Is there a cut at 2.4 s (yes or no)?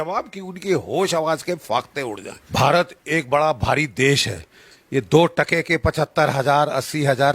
yes